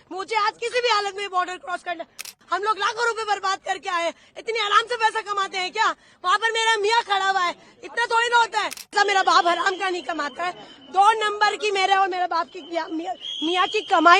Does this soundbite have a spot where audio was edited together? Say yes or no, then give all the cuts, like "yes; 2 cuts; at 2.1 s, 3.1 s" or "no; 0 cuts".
yes; 2 cuts; at 2.3 s, 8.9 s